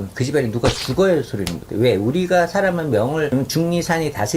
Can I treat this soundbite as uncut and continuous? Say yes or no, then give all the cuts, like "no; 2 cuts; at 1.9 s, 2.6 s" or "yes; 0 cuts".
no; 1 cut; at 3.3 s